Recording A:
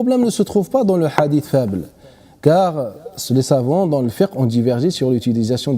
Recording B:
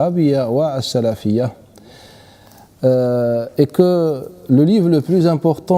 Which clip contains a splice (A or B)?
A